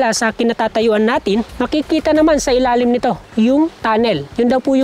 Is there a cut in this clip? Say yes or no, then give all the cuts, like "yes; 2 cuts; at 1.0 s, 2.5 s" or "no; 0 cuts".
yes; 2 cuts; at 1.5 s, 4.1 s